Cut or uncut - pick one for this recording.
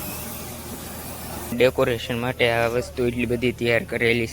cut